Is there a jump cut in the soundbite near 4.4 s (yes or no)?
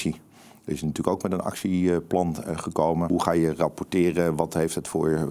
no